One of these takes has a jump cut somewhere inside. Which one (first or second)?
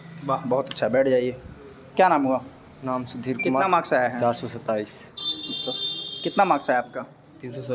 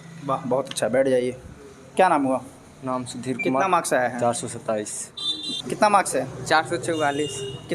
second